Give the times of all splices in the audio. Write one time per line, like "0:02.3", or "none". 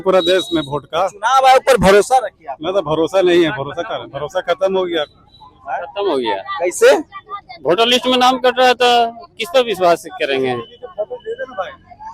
none